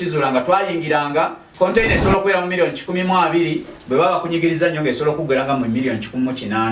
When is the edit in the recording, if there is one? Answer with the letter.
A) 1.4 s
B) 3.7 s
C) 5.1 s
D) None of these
A